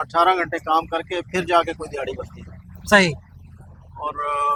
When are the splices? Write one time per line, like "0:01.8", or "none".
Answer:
none